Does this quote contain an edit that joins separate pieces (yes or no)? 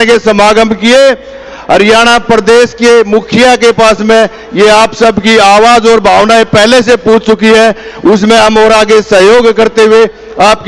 no